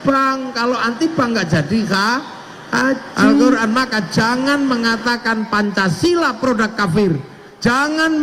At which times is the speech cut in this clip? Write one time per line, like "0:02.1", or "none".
0:03.6